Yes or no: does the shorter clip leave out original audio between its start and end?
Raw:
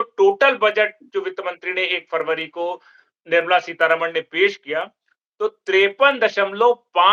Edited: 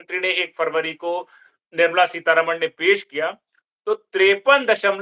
no